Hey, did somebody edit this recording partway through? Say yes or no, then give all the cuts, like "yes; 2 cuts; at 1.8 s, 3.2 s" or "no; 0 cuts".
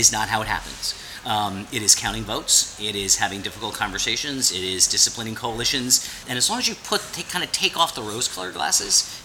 yes; 1 cut; at 6.2 s